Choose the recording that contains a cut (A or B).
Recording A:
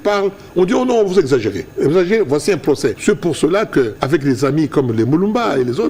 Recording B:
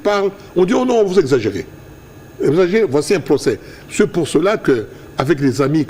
A